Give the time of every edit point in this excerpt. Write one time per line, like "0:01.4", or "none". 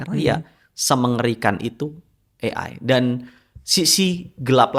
none